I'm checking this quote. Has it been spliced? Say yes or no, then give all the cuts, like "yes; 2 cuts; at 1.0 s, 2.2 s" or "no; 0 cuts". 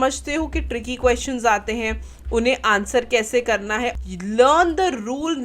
yes; 1 cut; at 3.9 s